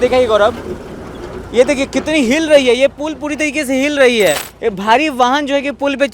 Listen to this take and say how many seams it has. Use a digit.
1